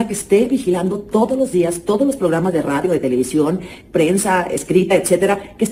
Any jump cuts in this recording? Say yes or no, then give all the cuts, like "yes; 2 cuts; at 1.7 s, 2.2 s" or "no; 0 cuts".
no; 0 cuts